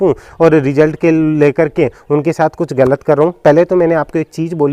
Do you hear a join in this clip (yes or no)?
no